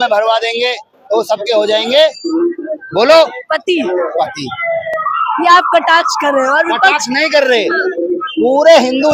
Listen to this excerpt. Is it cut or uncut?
uncut